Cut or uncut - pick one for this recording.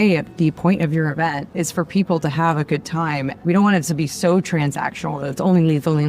cut